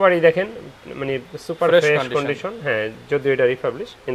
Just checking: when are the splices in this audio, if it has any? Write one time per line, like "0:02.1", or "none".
none